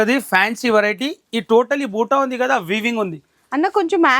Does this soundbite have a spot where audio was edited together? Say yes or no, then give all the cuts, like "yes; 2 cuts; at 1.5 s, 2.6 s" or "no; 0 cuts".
no; 0 cuts